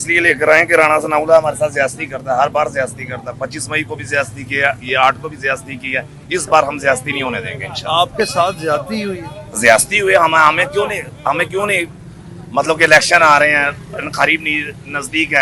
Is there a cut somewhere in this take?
no; 0 cuts

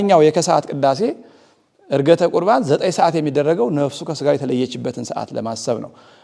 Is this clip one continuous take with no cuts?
yes; 0 cuts

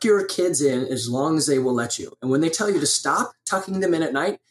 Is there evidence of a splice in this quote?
no; 0 cuts

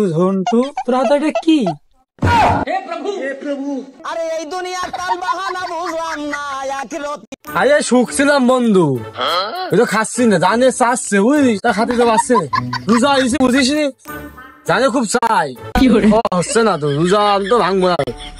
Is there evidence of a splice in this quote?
no; 0 cuts

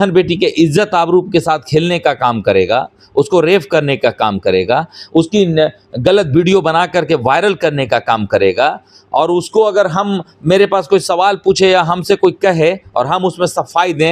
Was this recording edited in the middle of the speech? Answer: no; 0 cuts

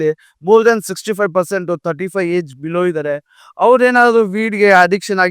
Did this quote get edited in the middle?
no; 0 cuts

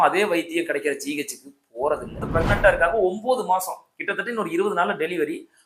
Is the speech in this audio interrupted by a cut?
yes; 1 cut; at 2.3 s

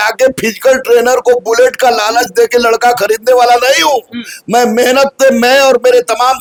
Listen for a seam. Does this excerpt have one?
no; 0 cuts

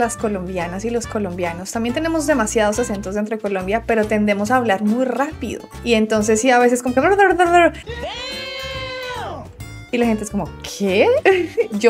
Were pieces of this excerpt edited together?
no; 0 cuts

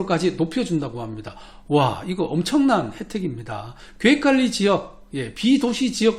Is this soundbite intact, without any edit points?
yes; 0 cuts

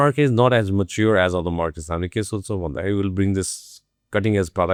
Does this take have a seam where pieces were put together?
no; 0 cuts

